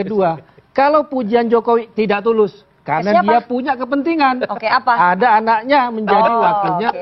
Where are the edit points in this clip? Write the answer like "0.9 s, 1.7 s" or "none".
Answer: none